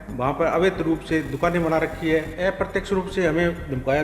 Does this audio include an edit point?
yes; 1 cut; at 2.3 s

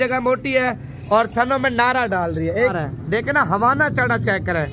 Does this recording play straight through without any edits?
no; 1 cut; at 2.7 s

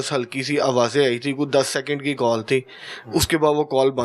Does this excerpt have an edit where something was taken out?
no; 0 cuts

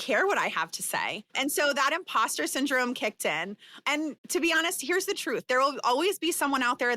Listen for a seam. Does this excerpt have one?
yes; 3 cuts; at 1.2 s, 3.0 s, 4.2 s

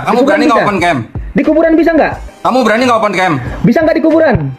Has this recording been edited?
no; 0 cuts

